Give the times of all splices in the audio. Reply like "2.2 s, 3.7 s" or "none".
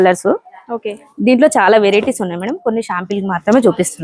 none

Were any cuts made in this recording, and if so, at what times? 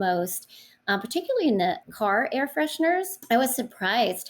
1.9 s, 3.2 s

